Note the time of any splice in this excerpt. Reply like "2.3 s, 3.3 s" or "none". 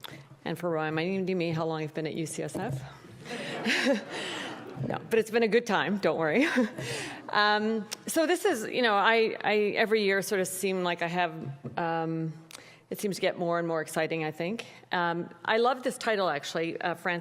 9.0 s